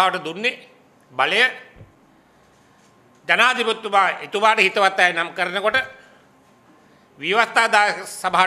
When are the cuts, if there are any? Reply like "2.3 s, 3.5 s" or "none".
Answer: none

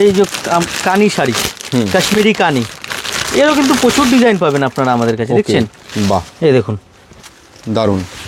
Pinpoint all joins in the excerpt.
none

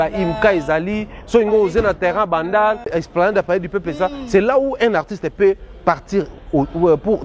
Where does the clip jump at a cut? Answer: 2.9 s

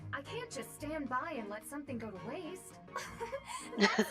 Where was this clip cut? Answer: 2.8 s

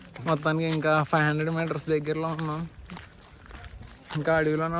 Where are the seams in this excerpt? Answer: 2.8 s

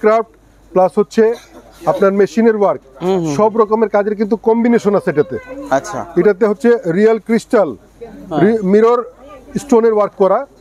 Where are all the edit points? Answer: none

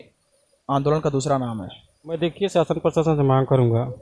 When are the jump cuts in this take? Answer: 2.2 s

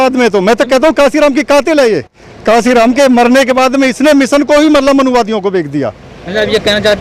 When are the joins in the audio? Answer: none

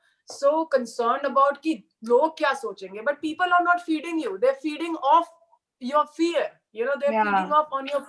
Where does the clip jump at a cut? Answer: none

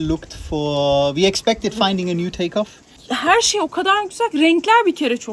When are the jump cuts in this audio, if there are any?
3.0 s

